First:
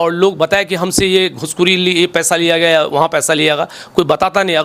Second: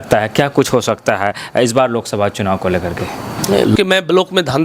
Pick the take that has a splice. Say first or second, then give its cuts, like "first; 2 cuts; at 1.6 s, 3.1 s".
second; 1 cut; at 3.7 s